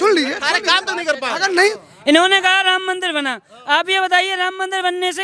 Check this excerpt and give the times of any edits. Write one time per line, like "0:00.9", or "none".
0:01.7